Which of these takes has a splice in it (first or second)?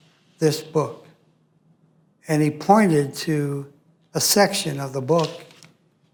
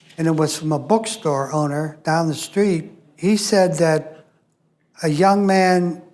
second